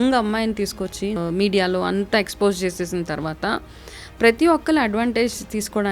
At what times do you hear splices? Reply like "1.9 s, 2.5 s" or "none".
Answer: 1.2 s